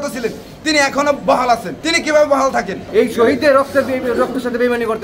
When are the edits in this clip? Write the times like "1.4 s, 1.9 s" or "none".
1.8 s, 2.8 s

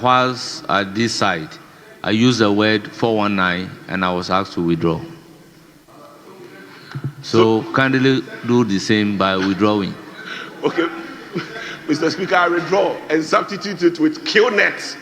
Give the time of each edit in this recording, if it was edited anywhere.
none

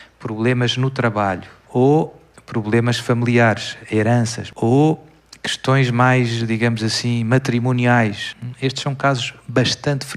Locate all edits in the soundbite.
1.5 s, 4.4 s

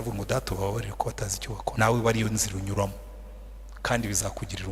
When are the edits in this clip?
1.7 s

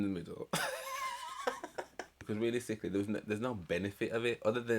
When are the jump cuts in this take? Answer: 2.2 s

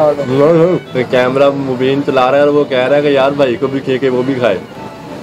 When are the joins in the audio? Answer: 0.9 s

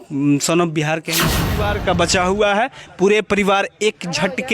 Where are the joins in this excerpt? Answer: 1.4 s

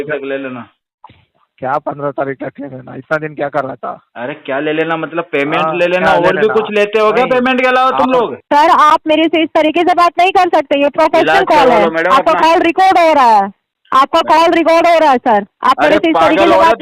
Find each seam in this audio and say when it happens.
8.4 s

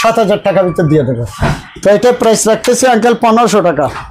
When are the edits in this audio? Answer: 1.3 s

